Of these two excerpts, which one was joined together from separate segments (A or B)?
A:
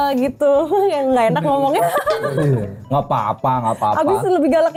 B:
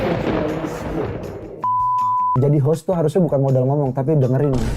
B